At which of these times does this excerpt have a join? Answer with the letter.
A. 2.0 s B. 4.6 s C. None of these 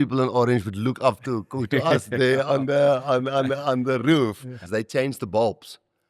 B